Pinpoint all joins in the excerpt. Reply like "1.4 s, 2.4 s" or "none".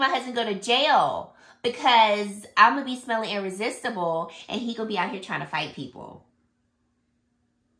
none